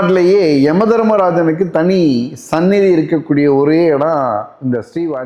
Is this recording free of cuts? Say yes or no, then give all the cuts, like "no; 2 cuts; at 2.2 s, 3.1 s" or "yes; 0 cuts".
yes; 0 cuts